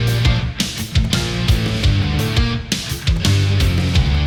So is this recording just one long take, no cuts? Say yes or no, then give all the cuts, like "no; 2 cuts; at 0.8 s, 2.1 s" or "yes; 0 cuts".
yes; 0 cuts